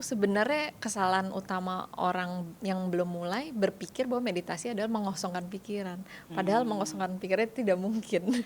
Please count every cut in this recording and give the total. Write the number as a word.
one